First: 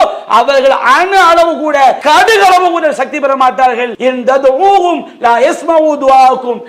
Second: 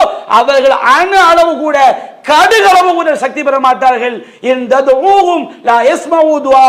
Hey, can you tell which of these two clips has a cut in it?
first; 2 cuts; at 2.0 s, 3.9 s

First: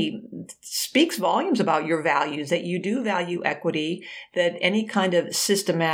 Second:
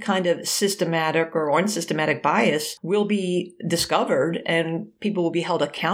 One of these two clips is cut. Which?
second; 1 cut; at 2.7 s

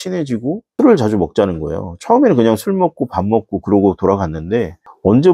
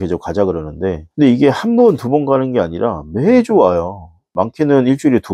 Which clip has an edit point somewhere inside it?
second; 1 cut; at 1.0 s

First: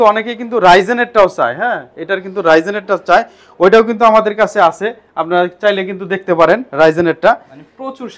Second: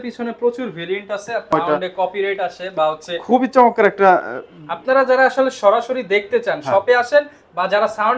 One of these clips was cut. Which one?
second; 1 cut; at 1.5 s

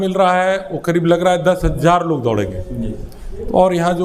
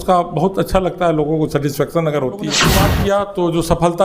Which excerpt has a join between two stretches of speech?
second; 1 cut; at 2.8 s

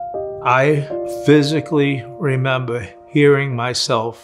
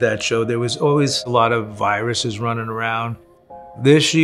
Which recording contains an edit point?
first; 1 cut; at 1.1 s

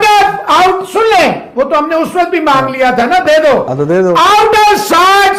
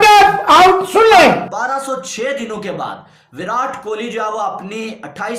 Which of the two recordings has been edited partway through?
second; 1 cut; at 1.4 s

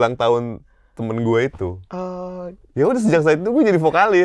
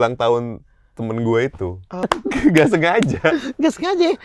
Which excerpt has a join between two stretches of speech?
second; 1 cut; at 2.1 s

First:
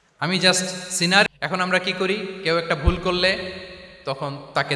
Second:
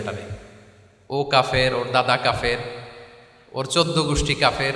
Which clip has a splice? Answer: first; 1 cut; at 1.3 s

